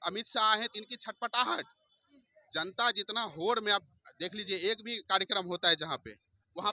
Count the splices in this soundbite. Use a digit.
0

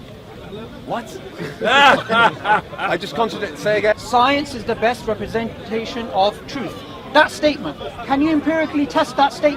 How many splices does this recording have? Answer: 1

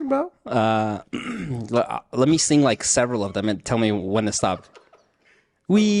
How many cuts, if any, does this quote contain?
0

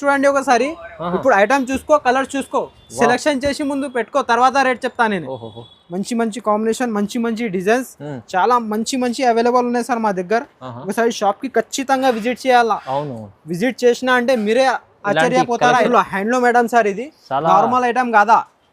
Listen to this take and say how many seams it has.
2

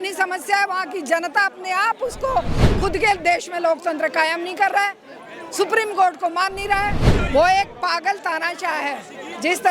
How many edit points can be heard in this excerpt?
2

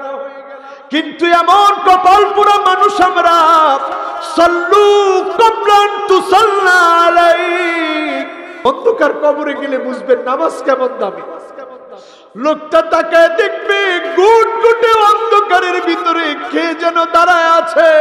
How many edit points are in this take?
1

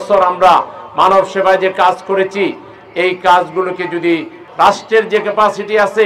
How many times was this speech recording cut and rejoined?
1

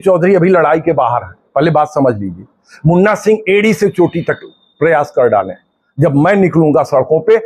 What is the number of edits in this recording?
0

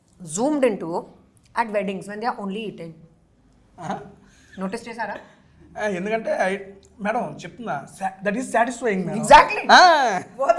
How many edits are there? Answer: 0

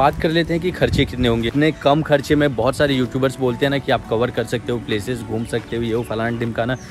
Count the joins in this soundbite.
1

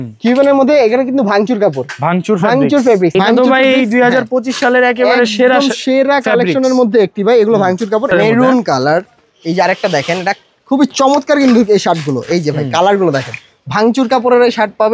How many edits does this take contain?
2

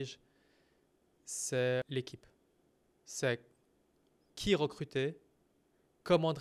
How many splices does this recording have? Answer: 2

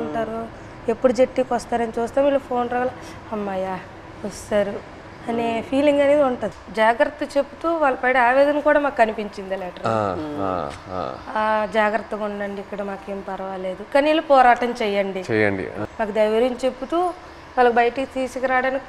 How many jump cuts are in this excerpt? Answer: 2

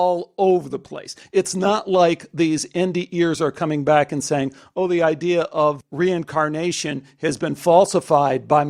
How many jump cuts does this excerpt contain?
0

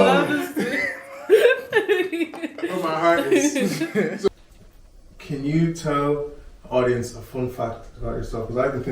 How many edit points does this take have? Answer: 1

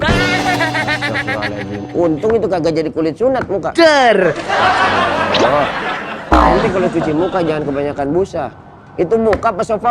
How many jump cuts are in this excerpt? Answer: 1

